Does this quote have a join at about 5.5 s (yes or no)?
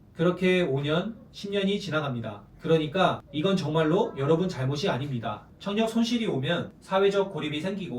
yes